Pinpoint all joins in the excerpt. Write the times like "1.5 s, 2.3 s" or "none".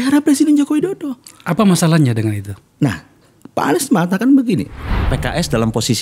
5.1 s